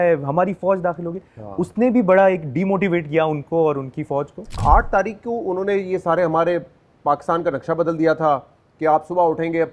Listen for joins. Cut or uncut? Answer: cut